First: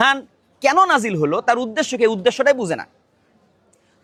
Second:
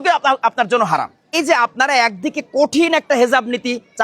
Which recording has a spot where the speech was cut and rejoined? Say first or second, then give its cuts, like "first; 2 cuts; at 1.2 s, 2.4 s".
second; 1 cut; at 1.3 s